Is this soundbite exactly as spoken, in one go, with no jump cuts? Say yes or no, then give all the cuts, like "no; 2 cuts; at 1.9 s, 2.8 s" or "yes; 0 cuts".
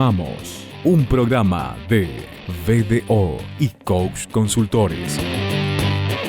no; 1 cut; at 5.1 s